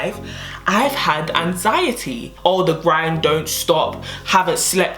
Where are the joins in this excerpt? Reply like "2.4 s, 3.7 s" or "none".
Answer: 2.3 s